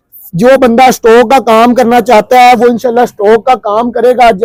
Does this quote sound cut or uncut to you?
uncut